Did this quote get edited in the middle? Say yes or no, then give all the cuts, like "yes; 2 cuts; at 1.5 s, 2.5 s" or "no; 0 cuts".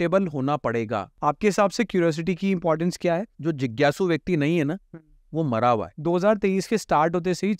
yes; 3 cuts; at 1.1 s, 3.3 s, 5.9 s